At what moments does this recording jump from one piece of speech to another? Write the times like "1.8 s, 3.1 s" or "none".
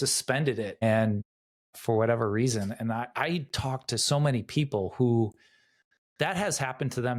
none